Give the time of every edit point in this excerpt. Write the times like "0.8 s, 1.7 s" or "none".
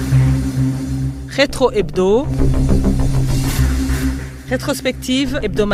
none

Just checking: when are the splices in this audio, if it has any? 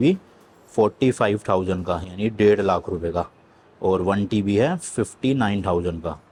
none

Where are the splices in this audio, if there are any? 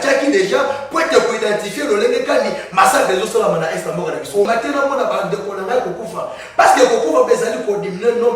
4.4 s

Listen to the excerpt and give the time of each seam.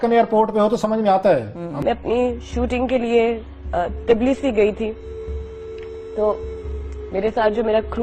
1.8 s

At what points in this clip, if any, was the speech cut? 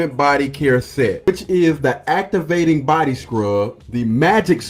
1.3 s

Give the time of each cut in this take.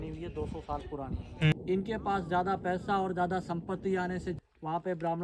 1.5 s, 4.4 s

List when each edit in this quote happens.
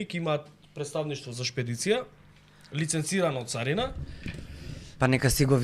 none

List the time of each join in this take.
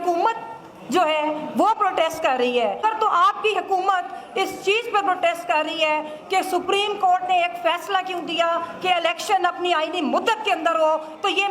2.8 s

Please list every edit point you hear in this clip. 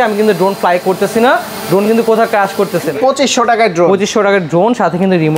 2.9 s

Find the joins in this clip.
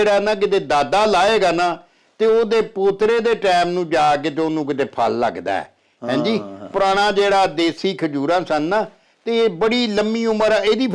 none

